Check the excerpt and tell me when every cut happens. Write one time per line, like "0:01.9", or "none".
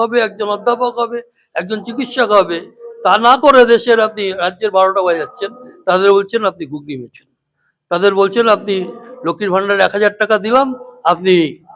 none